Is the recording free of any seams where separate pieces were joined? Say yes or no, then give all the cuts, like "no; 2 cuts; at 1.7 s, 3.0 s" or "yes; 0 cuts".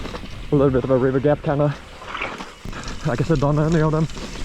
no; 1 cut; at 2.7 s